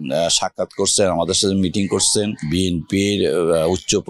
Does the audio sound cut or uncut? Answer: cut